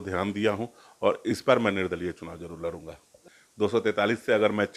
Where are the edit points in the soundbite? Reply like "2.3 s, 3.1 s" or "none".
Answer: 3.2 s